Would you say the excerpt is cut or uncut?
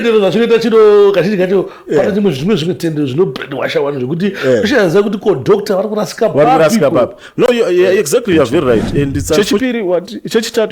cut